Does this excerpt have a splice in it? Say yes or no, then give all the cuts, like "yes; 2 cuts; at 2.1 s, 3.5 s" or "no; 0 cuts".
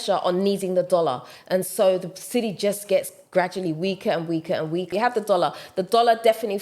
yes; 1 cut; at 4.9 s